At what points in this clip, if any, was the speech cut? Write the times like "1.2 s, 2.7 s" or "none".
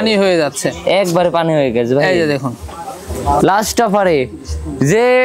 3.4 s